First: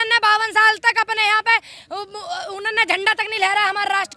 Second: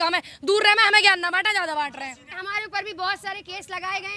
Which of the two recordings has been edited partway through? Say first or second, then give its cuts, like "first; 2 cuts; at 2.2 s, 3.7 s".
second; 1 cut; at 2.4 s